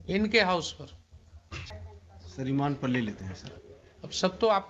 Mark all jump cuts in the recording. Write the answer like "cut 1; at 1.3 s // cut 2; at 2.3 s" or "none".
cut 1; at 1.7 s

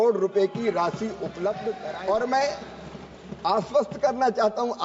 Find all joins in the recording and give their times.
cut 1; at 1.8 s

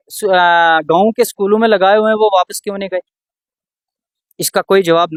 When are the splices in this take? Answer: none

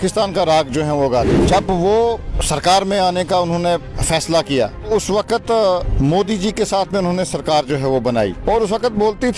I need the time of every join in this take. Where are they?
cut 1; at 1.4 s // cut 2; at 2.3 s // cut 3; at 3.9 s // cut 4; at 4.9 s // cut 5; at 5.9 s // cut 6; at 8.4 s

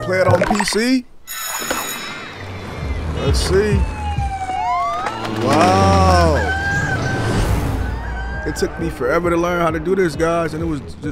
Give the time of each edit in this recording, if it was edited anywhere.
none

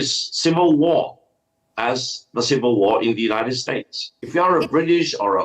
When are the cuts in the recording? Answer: cut 1; at 4.2 s

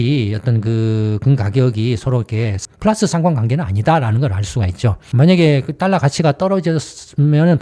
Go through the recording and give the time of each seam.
cut 1; at 2.5 s // cut 2; at 5.0 s

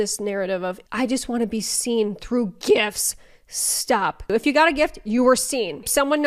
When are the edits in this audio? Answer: none

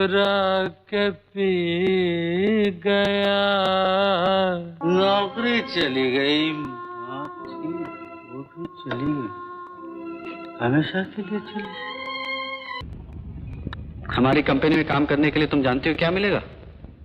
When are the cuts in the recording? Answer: cut 1; at 12.8 s

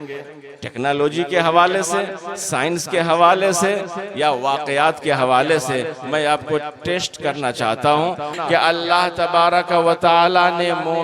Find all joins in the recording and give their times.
cut 1; at 8.3 s

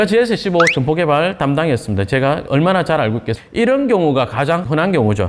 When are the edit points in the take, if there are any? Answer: cut 1; at 3.4 s

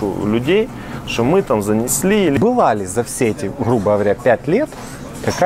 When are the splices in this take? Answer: cut 1; at 2.4 s

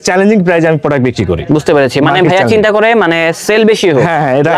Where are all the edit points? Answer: none

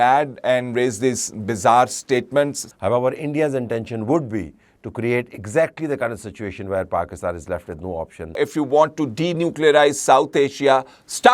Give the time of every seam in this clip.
cut 1; at 2.6 s // cut 2; at 8.4 s

